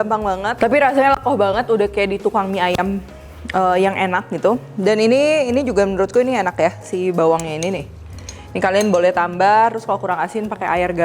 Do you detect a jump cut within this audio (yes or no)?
no